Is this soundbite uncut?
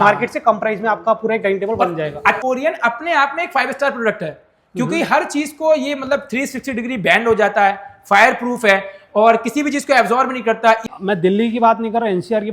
no; 2 cuts; at 2.4 s, 10.9 s

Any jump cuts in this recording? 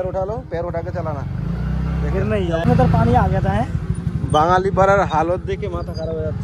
yes; 1 cut; at 2.6 s

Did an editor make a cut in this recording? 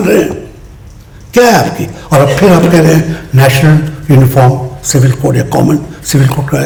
no; 0 cuts

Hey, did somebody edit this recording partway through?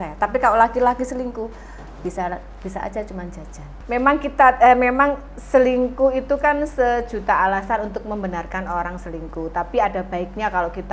yes; 1 cut; at 3.7 s

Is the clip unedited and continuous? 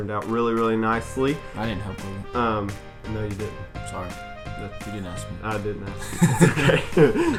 yes; 0 cuts

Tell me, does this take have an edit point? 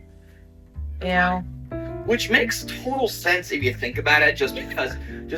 no; 0 cuts

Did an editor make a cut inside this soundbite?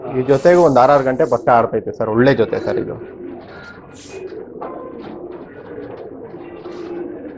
no; 0 cuts

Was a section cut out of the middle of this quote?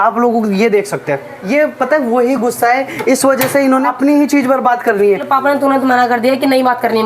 yes; 3 cuts; at 1.5 s, 3.8 s, 5.2 s

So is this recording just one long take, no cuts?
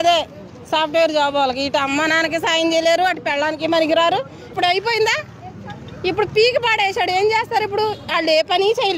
no; 1 cut; at 4.5 s

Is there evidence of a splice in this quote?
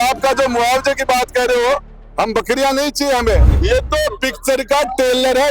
yes; 1 cut; at 3.5 s

